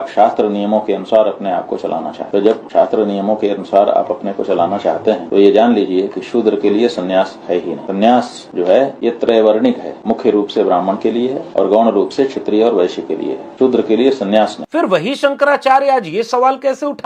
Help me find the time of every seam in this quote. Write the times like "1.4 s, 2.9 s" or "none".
none